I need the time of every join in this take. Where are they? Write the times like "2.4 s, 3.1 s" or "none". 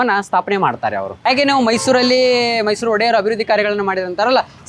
1.2 s